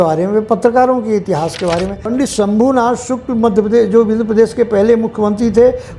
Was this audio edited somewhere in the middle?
yes; 1 cut; at 2.1 s

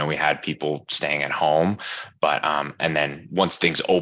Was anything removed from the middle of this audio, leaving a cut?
no; 0 cuts

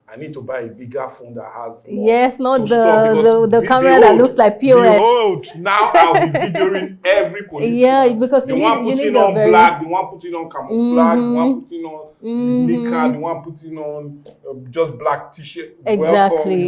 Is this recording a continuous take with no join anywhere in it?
yes; 0 cuts

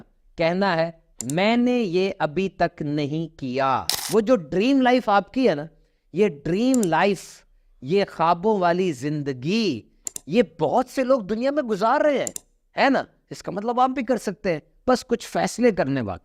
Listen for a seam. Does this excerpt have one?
yes; 1 cut; at 4.0 s

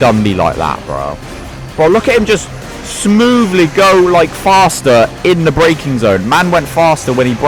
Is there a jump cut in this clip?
no; 0 cuts

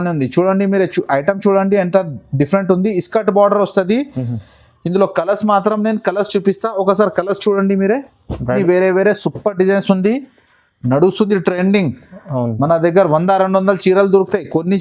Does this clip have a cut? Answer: yes; 1 cut; at 8.6 s

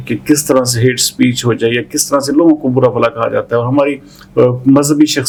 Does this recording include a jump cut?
no; 0 cuts

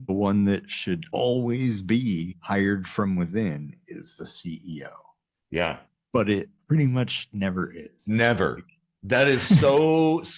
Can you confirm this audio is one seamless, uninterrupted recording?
no; 2 cuts; at 1.1 s, 2.3 s

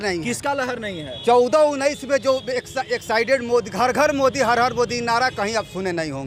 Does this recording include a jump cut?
no; 0 cuts

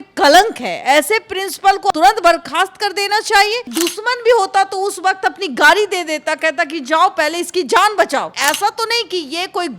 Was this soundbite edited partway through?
yes; 3 cuts; at 1.9 s, 3.7 s, 8.3 s

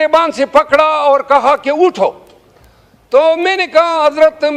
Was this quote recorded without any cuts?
yes; 0 cuts

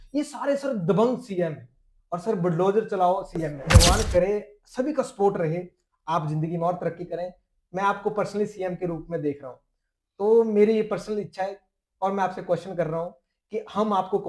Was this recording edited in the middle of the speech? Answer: yes; 1 cut; at 3.8 s

